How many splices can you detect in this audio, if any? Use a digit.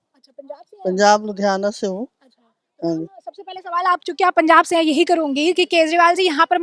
0